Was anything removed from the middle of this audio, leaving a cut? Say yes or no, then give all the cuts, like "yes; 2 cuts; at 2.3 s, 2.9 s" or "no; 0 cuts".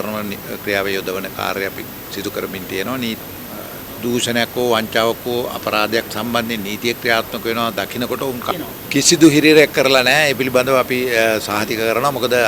yes; 2 cuts; at 3.2 s, 8.5 s